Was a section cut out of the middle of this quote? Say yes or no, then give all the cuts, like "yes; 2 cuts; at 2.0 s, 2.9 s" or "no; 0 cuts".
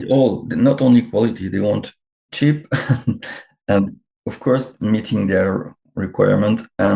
no; 0 cuts